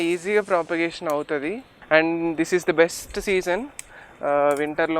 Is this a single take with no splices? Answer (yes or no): no